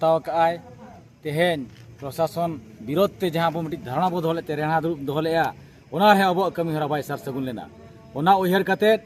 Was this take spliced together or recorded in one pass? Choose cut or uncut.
uncut